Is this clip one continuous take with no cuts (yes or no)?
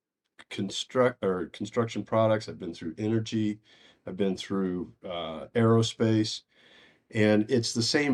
yes